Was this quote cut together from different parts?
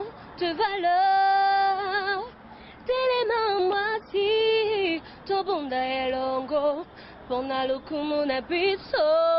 yes; 1 cut; at 1.3 s

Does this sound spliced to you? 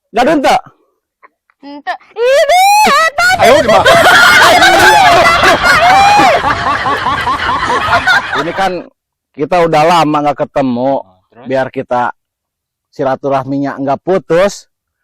yes; 1 cut; at 8.3 s

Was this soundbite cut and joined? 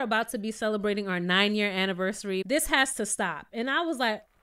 yes; 1 cut; at 2.4 s

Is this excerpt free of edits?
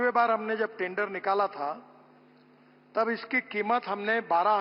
yes; 0 cuts

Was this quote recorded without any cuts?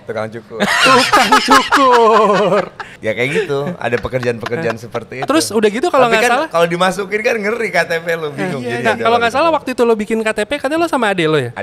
no; 1 cut; at 2.8 s

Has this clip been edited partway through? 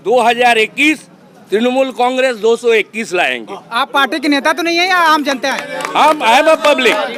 no; 0 cuts

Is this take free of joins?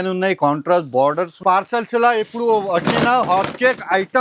no; 1 cut; at 1.4 s

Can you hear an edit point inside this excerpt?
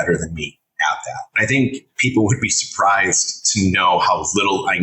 yes; 1 cut; at 1.3 s

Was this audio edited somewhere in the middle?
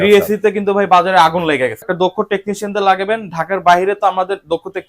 yes; 1 cut; at 1.8 s

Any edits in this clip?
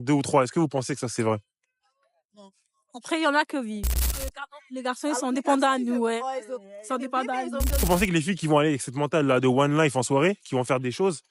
yes; 2 cuts; at 4.0 s, 7.8 s

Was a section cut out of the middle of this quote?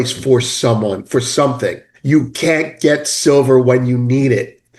yes; 1 cut; at 1.9 s

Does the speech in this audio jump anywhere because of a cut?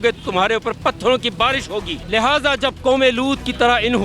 yes; 1 cut; at 2.0 s

